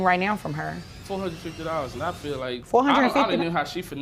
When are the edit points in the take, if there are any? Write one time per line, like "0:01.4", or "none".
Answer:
0:00.9
0:02.6

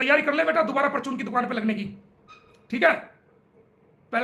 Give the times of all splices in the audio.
none

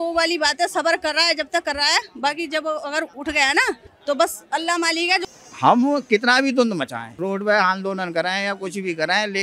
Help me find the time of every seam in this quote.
0:03.9
0:05.2
0:07.0

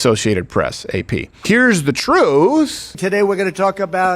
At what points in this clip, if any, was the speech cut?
0:01.3
0:02.8

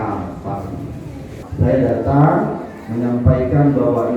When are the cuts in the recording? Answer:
0:01.4

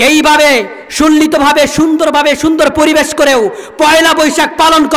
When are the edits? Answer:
none

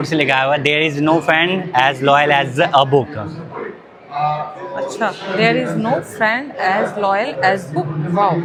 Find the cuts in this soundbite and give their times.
none

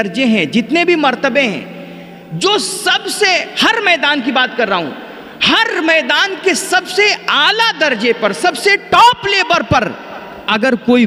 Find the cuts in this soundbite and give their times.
none

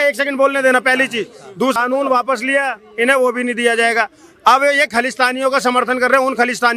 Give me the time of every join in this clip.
0:01.8

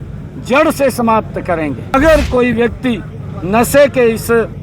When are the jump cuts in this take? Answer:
0:01.9

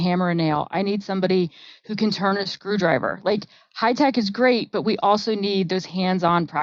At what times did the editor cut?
none

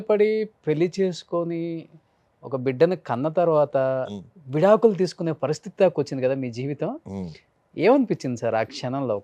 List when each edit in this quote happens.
none

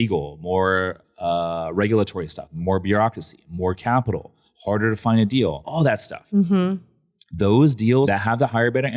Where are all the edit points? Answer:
0:05.6
0:08.1

